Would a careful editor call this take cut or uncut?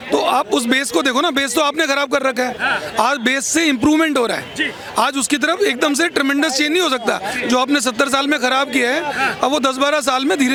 uncut